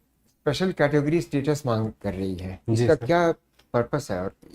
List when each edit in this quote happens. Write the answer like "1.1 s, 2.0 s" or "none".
none